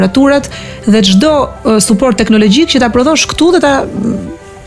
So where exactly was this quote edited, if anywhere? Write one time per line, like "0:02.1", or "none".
none